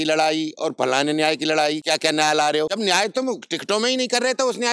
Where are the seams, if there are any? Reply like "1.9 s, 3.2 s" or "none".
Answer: 1.8 s, 2.7 s